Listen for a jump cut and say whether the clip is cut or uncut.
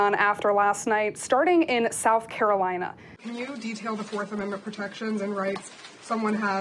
cut